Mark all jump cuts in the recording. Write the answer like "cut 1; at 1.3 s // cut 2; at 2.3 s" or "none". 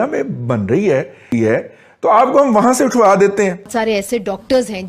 cut 1; at 1.3 s // cut 2; at 3.7 s